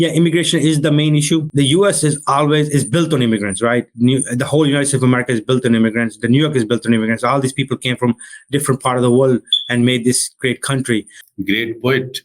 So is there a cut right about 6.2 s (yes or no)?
no